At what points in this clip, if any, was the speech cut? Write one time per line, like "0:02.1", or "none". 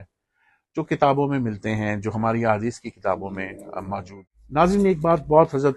0:04.1